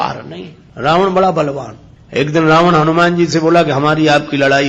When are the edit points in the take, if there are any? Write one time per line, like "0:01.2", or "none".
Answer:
none